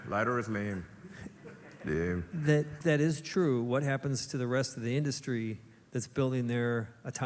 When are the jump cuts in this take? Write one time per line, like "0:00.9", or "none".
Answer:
0:02.8

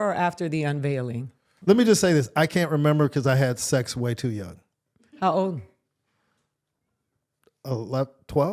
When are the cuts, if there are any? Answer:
0:01.4

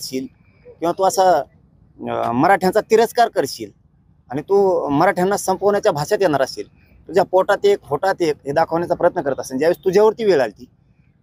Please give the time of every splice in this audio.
none

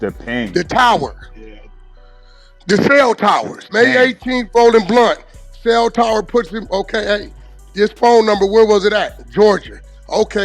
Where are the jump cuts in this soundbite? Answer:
0:03.7

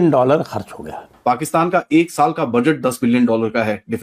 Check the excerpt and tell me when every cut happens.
0:01.1

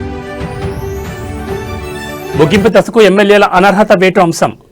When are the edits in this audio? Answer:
0:01.1

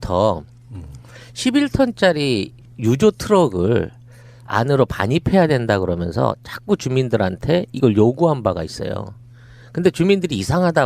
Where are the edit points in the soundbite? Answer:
none

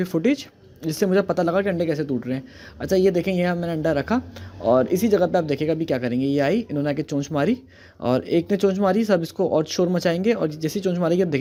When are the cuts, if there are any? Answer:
none

